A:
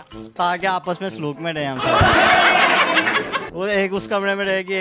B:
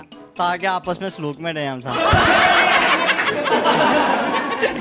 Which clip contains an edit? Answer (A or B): A